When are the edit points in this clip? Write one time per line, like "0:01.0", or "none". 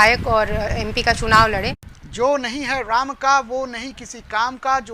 0:01.9